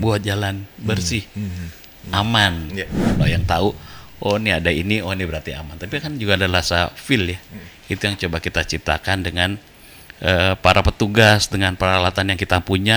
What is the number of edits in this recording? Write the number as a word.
one